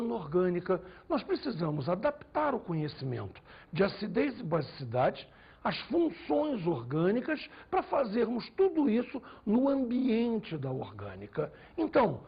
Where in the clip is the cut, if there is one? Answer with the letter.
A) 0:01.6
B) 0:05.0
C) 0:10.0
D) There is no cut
B